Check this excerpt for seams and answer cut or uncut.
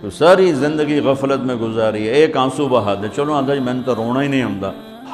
uncut